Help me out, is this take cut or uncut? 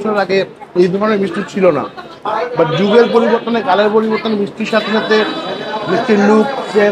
uncut